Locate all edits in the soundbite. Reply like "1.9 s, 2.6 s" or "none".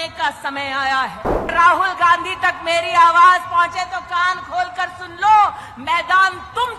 1.5 s